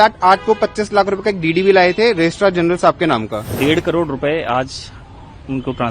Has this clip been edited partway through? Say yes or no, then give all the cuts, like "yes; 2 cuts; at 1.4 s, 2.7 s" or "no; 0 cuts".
yes; 1 cut; at 3.5 s